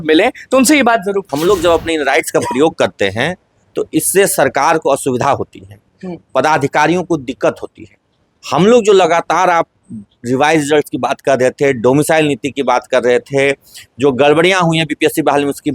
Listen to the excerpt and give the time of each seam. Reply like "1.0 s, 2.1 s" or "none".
1.3 s